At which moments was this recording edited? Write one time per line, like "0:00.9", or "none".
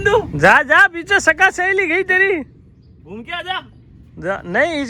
none